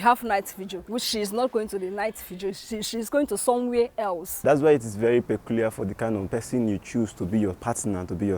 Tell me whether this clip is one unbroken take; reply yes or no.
no